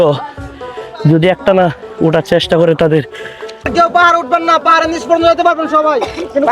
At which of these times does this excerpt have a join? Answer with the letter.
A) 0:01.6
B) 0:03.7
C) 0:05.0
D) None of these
B